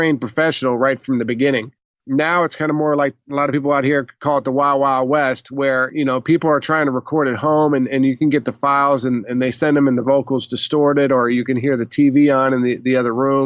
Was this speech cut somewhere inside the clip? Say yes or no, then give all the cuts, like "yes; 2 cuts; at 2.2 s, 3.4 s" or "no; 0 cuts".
yes; 1 cut; at 5.9 s